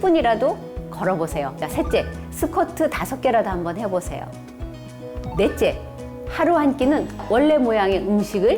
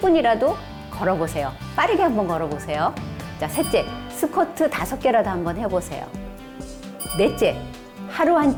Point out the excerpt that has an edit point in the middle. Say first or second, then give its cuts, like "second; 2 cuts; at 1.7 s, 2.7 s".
first; 2 cuts; at 1.6 s, 7.2 s